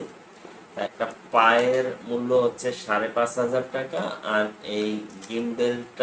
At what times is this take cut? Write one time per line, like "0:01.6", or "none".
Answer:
0:00.9